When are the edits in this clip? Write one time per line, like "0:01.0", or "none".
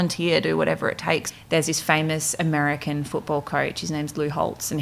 0:01.3